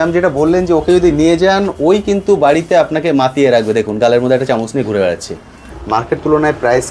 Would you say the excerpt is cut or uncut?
cut